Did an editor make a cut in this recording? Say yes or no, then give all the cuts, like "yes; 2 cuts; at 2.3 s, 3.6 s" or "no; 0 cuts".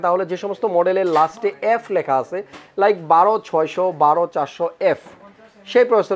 no; 0 cuts